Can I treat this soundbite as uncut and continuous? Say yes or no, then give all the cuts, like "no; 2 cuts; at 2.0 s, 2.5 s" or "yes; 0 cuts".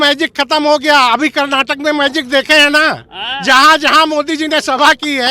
yes; 0 cuts